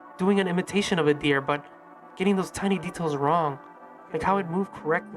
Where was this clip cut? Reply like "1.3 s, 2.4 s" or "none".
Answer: none